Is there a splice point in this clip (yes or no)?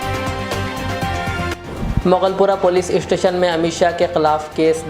yes